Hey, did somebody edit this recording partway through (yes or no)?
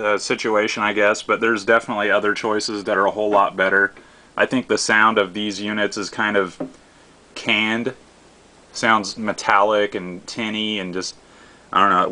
no